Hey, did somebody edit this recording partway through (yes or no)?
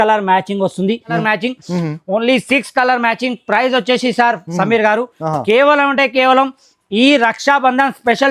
yes